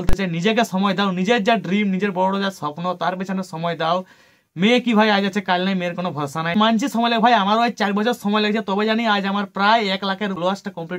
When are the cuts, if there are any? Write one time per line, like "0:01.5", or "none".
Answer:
none